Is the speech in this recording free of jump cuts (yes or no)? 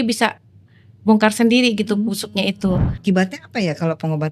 no